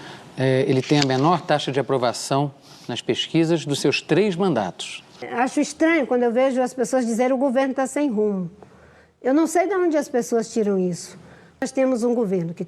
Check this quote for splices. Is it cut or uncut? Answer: cut